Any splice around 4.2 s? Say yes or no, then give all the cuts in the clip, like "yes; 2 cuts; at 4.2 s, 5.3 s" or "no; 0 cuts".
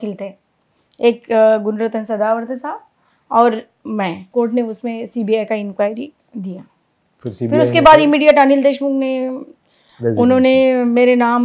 yes; 2 cuts; at 4.2 s, 6.2 s